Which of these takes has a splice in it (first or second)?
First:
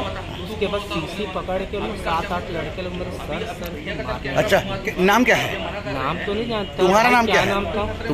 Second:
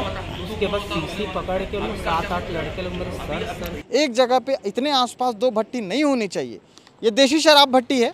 second